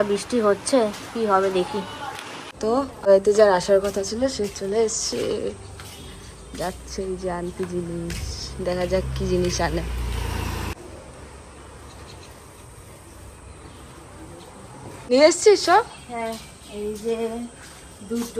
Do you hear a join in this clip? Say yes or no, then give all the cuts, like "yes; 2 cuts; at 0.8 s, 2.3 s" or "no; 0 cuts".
no; 0 cuts